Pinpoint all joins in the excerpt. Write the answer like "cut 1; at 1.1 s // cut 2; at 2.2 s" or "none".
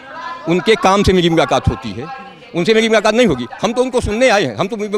none